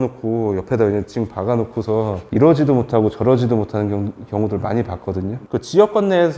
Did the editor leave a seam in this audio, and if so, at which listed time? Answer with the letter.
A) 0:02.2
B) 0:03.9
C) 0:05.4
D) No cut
C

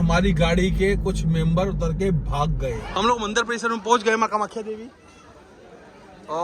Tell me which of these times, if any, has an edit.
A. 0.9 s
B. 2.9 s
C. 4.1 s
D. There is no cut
B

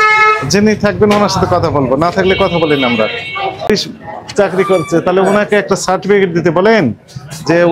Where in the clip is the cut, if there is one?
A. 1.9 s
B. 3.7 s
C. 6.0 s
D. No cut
B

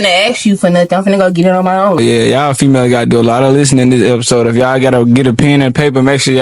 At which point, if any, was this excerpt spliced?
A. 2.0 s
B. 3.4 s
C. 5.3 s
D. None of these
A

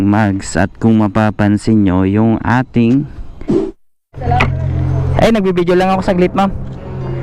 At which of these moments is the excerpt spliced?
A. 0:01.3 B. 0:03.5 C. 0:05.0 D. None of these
B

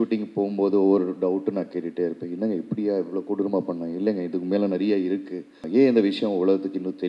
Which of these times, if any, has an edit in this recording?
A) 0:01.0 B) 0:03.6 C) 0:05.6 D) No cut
C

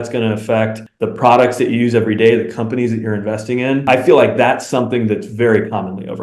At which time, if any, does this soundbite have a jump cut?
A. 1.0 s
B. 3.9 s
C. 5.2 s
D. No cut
B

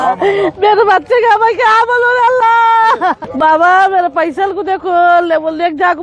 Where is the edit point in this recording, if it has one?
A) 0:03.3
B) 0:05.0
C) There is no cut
A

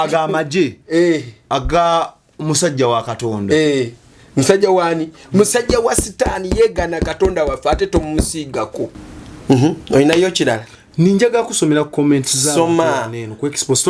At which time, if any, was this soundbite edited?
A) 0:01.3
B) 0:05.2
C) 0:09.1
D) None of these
C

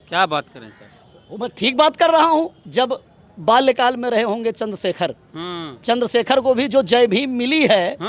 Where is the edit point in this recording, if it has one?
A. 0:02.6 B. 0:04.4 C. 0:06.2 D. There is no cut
A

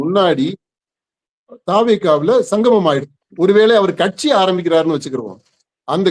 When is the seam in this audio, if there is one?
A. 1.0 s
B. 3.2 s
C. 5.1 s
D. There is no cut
B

